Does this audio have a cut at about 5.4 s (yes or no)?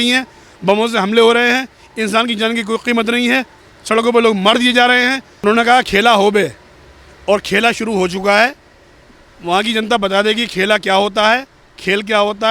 yes